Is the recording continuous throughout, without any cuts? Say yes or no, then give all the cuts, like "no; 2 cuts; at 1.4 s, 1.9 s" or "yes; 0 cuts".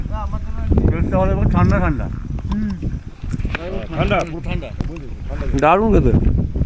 yes; 0 cuts